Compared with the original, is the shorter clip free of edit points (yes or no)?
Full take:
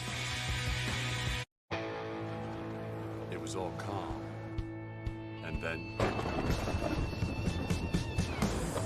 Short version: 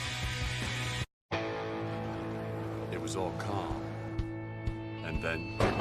no